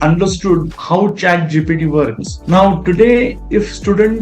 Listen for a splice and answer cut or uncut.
uncut